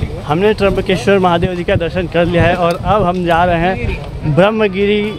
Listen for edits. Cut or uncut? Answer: uncut